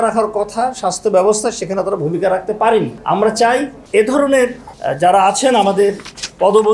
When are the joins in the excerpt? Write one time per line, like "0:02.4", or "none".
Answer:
0:03.0
0:03.8
0:04.7